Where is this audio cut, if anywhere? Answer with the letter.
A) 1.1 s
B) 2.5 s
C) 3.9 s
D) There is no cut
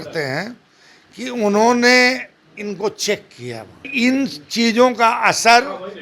C